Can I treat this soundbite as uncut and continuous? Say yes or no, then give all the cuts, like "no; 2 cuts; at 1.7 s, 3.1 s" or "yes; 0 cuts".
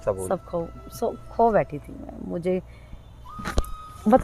yes; 0 cuts